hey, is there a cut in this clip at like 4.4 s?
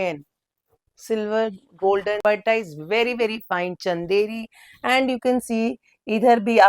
no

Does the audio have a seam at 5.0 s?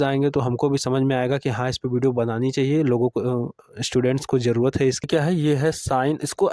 yes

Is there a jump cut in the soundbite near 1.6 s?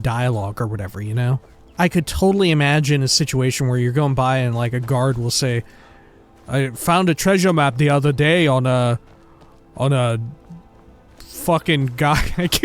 yes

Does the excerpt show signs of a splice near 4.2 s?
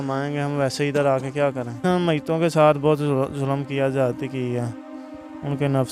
no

